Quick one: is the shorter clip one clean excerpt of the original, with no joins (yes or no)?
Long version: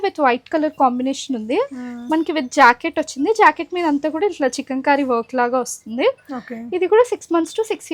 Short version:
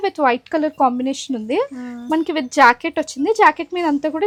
yes